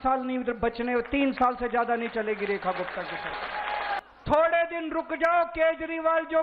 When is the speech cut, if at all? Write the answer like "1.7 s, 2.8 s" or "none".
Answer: 4.0 s